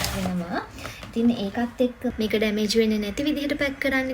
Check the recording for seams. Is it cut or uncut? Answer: cut